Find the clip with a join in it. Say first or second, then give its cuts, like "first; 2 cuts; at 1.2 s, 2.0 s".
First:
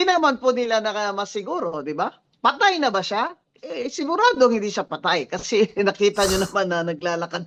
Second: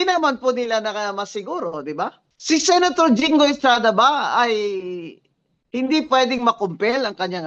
second; 1 cut; at 2.2 s